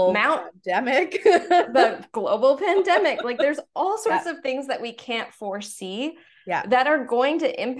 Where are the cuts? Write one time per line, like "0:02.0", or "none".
none